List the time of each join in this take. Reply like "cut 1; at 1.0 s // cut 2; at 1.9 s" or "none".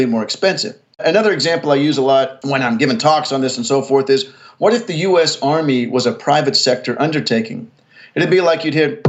cut 1; at 1.0 s // cut 2; at 2.4 s